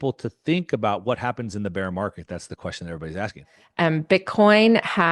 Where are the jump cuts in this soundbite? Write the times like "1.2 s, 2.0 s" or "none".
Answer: 3.5 s